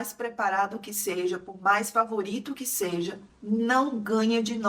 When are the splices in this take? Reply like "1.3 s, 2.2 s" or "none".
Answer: none